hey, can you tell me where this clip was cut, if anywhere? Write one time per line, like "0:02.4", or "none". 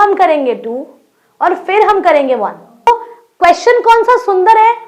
0:02.9